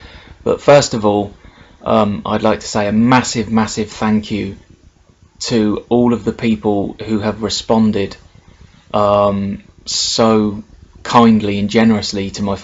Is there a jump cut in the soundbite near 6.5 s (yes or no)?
no